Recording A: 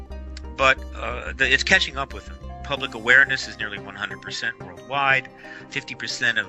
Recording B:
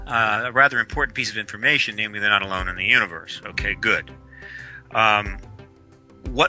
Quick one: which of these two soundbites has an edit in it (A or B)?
B